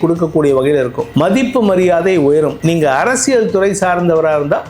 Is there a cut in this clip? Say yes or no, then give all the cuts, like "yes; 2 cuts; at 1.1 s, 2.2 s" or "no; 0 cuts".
yes; 2 cuts; at 1.0 s, 2.6 s